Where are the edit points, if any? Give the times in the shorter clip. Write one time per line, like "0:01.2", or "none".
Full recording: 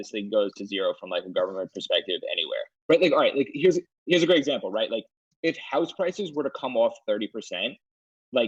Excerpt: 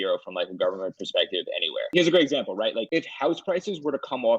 0:01.8
0:02.9